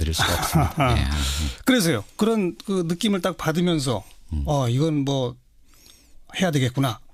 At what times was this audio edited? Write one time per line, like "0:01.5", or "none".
none